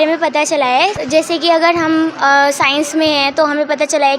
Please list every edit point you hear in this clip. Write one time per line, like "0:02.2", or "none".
0:01.0